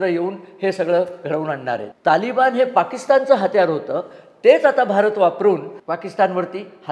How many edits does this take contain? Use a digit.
2